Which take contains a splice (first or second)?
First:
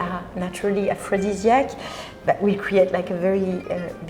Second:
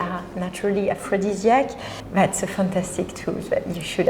second